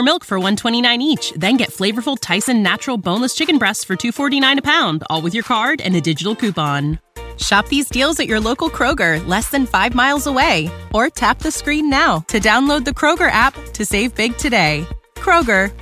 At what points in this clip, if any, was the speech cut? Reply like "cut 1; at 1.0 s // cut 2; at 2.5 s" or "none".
none